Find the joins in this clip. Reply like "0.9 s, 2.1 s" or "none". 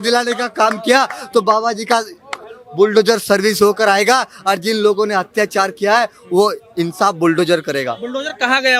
none